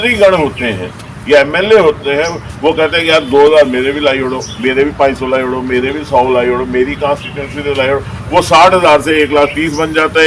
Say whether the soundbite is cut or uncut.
uncut